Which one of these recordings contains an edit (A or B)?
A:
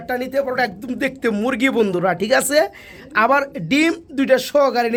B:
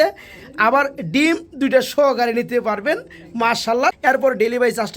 B